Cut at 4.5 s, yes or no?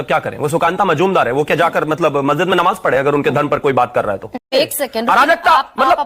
yes